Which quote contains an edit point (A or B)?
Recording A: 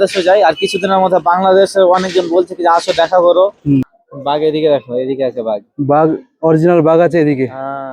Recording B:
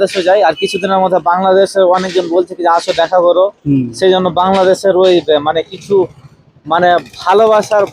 A